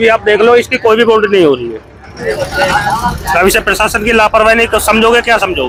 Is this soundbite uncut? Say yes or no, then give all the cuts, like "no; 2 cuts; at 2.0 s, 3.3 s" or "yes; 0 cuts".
yes; 0 cuts